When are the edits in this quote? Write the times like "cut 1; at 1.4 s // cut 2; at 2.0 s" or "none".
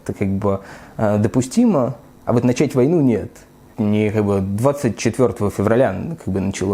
cut 1; at 3.7 s